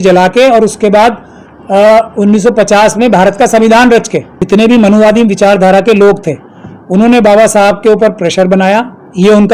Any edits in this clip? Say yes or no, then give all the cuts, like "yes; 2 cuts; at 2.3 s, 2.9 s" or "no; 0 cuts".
yes; 1 cut; at 4.3 s